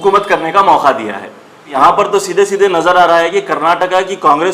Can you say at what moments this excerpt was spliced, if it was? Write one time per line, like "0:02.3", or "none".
0:01.7